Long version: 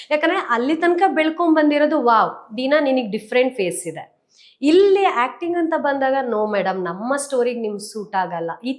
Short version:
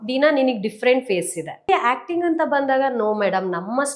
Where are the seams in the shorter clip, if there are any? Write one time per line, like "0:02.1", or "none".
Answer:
0:01.7

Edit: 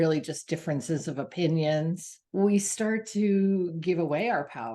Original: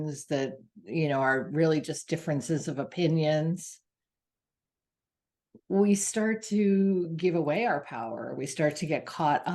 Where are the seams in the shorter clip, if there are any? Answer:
0:02.1

